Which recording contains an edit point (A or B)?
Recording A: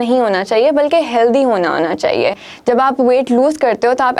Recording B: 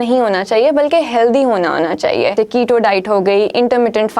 B